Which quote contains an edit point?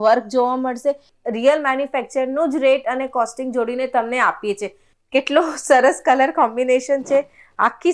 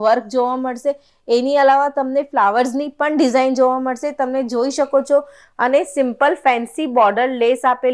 first; 2 cuts; at 1.1 s, 4.8 s

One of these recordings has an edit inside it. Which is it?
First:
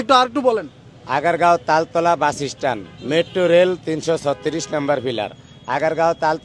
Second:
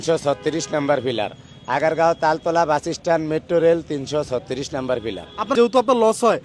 second; 1 cut; at 5.5 s

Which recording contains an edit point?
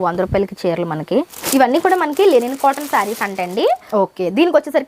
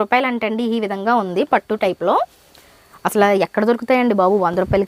first; 2 cuts; at 1.5 s, 3.8 s

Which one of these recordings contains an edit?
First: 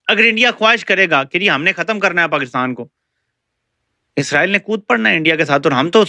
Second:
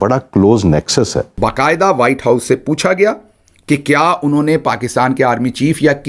second; 1 cut; at 1.4 s

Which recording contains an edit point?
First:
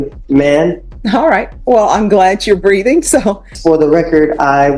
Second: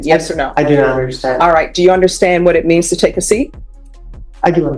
first; 2 cuts; at 0.9 s, 3.5 s

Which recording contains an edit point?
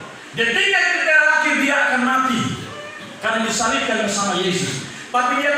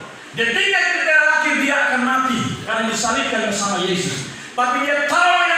second; 1 cut; at 2.6 s

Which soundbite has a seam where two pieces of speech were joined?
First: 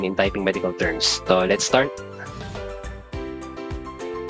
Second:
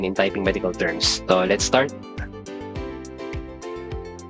second; 1 cut; at 1.9 s

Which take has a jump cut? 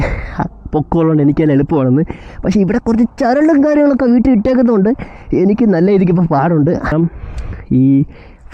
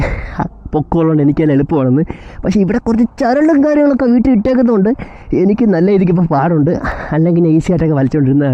first; 1 cut; at 6.9 s

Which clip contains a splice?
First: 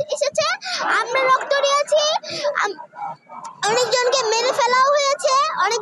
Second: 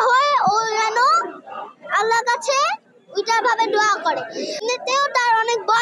second; 1 cut; at 4.6 s

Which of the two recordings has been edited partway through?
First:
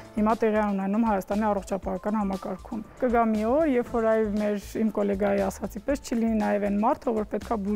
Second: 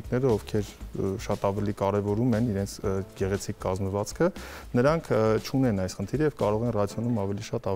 first; 1 cut; at 2.9 s

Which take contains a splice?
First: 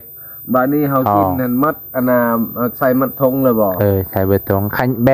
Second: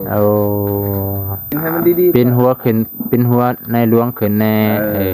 second; 1 cut; at 1.5 s

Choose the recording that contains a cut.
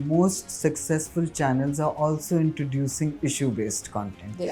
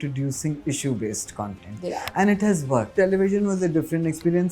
second; 1 cut; at 2.9 s

